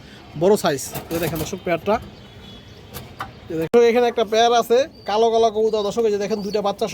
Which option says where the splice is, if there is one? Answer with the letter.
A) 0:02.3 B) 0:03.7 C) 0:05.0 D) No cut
B